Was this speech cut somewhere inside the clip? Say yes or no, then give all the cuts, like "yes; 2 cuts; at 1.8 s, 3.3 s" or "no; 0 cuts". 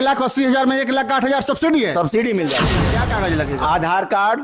yes; 1 cut; at 2.8 s